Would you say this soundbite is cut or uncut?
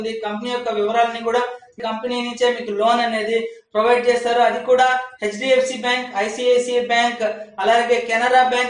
cut